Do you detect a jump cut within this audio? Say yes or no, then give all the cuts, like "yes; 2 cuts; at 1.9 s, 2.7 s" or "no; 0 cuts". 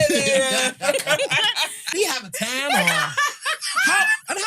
yes; 1 cut; at 1.9 s